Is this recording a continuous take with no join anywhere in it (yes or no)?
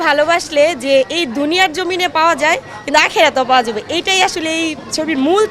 yes